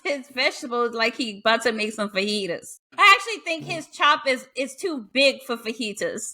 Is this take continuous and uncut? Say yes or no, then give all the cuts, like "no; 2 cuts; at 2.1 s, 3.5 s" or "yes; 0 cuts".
no; 1 cut; at 2.9 s